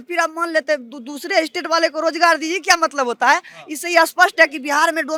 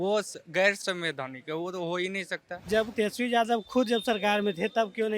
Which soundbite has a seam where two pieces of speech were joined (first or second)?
second